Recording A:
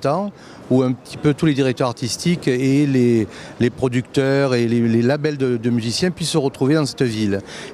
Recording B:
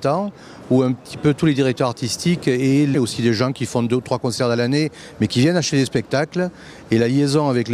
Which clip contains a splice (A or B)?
A